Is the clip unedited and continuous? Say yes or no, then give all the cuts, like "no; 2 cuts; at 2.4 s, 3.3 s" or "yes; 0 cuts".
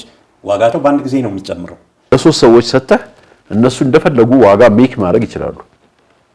no; 1 cut; at 1.9 s